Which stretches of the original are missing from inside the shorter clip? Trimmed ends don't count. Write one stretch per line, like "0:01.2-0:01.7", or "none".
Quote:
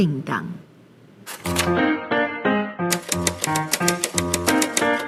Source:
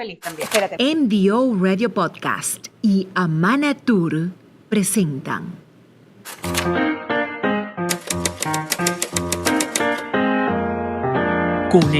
none